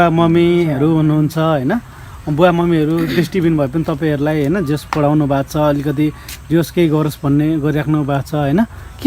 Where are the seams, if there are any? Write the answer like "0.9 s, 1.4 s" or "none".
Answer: none